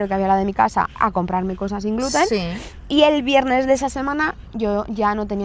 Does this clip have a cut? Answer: no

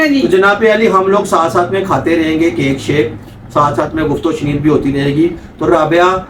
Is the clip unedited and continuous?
yes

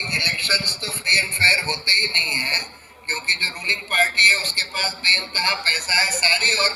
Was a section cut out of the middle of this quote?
no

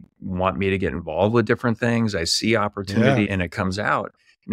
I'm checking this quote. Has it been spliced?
yes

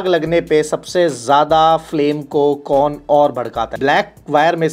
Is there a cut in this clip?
yes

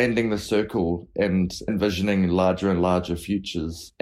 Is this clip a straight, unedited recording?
no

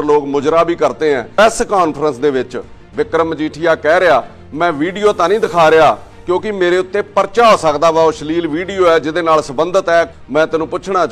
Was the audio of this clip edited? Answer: yes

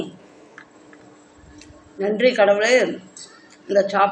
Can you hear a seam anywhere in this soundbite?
no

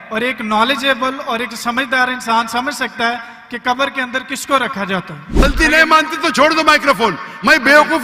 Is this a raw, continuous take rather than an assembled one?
no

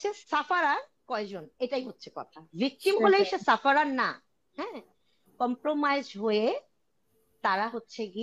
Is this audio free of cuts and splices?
yes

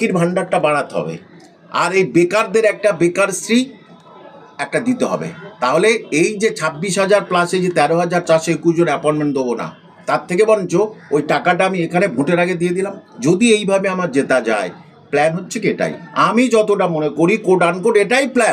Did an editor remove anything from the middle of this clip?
no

